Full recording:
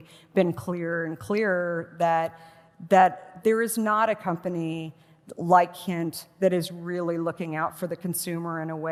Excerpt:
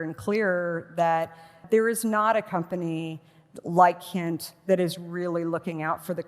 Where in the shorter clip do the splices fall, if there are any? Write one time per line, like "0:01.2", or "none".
0:01.5

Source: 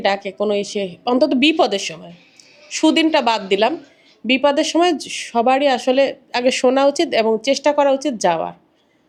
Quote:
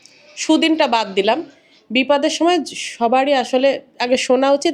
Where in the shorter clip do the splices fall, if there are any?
none

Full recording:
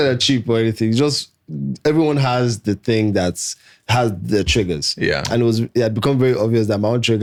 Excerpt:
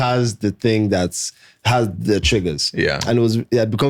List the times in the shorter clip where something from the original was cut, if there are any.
none

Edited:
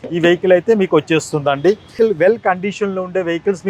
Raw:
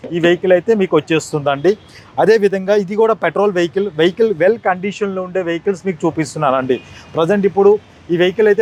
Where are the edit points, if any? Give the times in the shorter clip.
0:01.9

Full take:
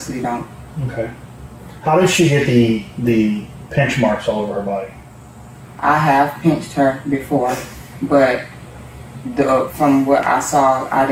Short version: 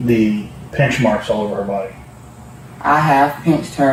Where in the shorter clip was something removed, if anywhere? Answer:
none

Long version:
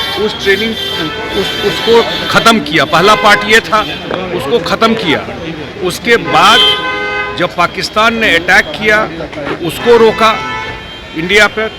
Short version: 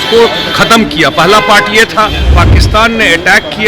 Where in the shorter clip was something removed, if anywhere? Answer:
0:02.3

